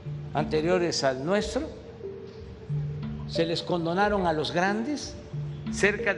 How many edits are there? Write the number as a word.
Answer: two